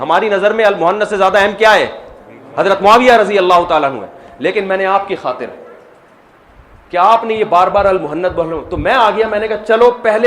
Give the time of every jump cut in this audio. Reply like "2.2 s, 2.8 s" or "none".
none